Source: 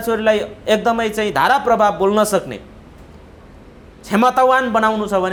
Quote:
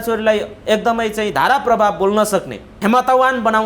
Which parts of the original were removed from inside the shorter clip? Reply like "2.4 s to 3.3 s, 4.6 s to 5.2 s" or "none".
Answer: 2.6 s to 3.9 s